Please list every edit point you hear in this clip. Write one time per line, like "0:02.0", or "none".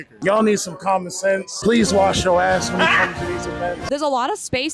0:01.5
0:03.8